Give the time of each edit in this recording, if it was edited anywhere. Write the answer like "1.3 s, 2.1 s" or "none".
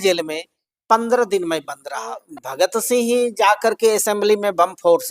2.2 s